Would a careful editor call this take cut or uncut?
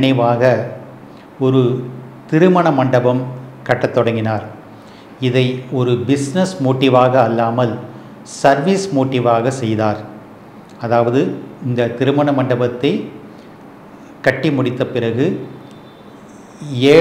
uncut